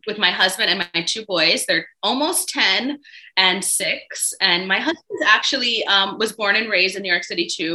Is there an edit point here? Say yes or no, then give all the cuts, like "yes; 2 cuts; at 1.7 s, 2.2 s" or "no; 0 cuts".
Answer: no; 0 cuts